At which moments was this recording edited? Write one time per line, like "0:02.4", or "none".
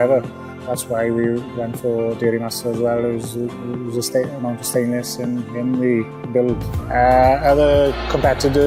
none